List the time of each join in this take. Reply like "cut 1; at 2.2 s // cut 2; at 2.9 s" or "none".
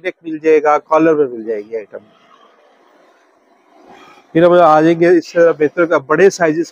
none